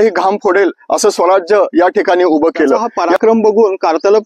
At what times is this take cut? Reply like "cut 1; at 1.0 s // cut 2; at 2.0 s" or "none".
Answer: cut 1; at 3.0 s

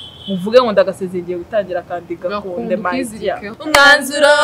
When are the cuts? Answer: cut 1; at 3.5 s

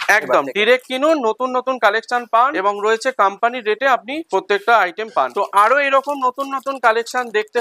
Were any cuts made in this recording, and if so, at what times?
cut 1; at 2.5 s // cut 2; at 4.2 s // cut 3; at 5.3 s

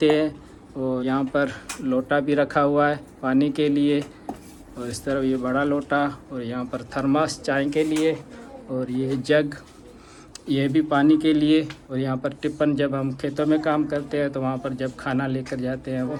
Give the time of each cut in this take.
none

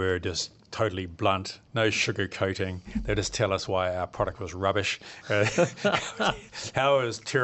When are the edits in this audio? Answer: cut 1; at 1.6 s

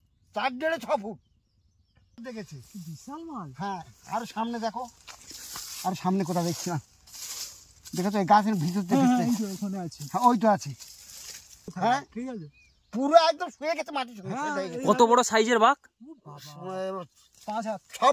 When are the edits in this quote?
cut 1; at 2.2 s // cut 2; at 11.7 s

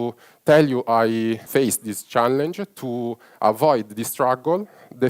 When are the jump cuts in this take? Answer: cut 1; at 1.4 s

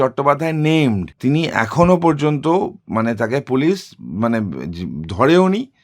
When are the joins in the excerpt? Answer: cut 1; at 1.1 s

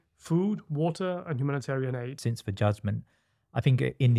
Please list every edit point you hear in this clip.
cut 1; at 2.2 s

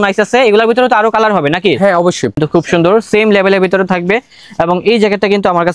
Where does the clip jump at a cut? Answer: cut 1; at 2.3 s

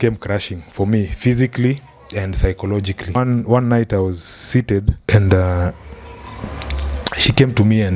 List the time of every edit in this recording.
cut 1; at 3.2 s // cut 2; at 4.9 s

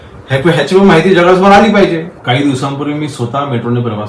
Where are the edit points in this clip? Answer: cut 1; at 2.1 s

